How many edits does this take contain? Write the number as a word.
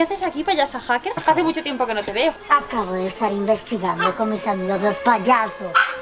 zero